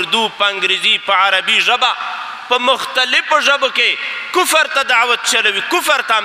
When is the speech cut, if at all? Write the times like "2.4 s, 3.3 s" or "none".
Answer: none